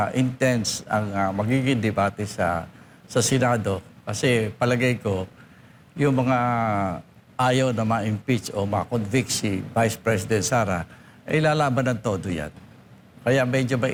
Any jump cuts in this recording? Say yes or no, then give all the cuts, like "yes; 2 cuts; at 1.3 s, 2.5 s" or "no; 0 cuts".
no; 0 cuts